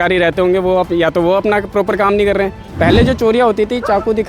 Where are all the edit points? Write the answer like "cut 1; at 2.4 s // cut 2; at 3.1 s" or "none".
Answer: cut 1; at 2.7 s